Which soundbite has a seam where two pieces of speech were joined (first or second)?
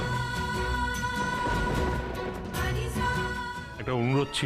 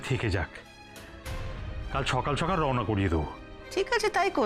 first